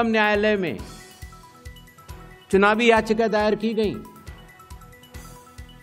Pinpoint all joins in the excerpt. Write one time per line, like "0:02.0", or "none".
none